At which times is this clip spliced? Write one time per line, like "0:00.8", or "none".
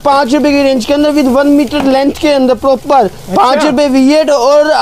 none